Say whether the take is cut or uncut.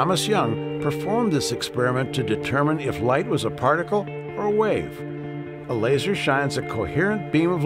uncut